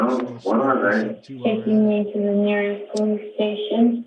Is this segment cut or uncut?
cut